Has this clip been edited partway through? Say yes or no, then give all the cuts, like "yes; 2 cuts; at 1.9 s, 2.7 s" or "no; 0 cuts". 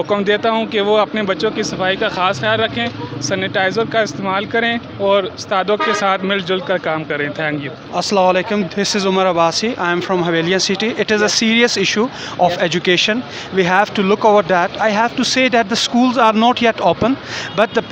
no; 0 cuts